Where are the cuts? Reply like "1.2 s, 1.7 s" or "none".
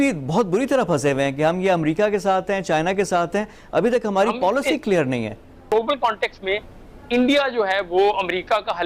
5.7 s

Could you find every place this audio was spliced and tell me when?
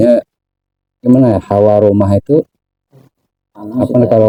none

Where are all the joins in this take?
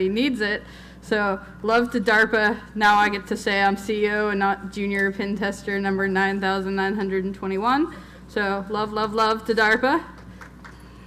3.0 s

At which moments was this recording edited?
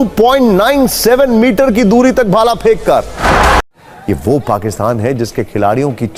3.5 s

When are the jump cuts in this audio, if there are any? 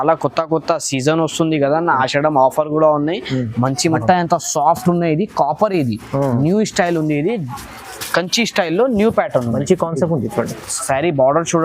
4.0 s

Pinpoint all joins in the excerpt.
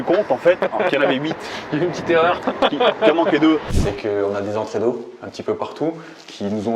3.7 s

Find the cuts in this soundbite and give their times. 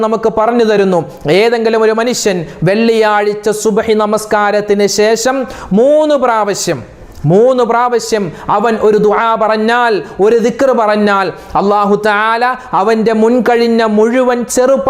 none

